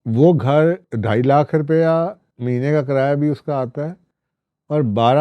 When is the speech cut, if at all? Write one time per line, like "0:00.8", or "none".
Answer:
0:01.0